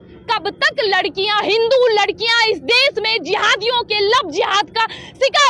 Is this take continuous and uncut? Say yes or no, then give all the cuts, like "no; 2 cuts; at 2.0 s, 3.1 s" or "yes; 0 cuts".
yes; 0 cuts